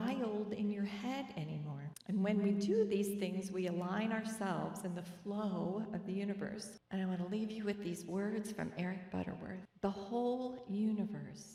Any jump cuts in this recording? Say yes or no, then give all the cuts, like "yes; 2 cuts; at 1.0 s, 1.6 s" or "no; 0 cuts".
no; 0 cuts